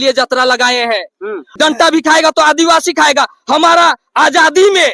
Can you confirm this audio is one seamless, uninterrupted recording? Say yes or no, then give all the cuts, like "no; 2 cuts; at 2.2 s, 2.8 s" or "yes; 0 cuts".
no; 1 cut; at 1.5 s